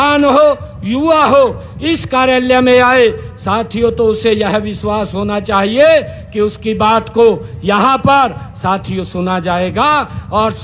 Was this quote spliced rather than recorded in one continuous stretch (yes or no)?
no